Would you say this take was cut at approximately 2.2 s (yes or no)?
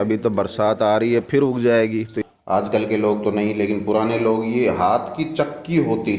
yes